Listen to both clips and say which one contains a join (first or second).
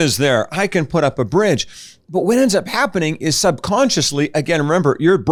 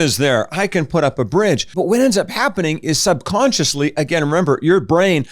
second